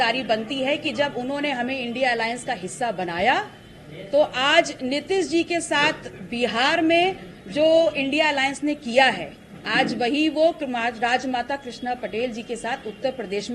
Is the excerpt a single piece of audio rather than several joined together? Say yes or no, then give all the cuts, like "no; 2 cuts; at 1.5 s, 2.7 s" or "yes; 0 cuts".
yes; 0 cuts